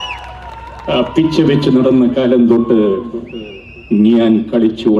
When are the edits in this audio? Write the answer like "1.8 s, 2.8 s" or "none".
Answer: none